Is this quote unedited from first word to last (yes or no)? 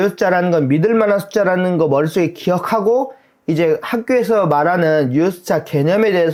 yes